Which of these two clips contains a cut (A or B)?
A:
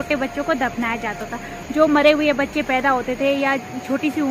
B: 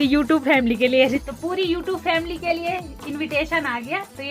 B